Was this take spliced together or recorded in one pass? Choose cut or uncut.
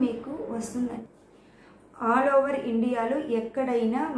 cut